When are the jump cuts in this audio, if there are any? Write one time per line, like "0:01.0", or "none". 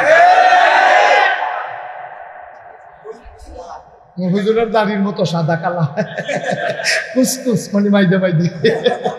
none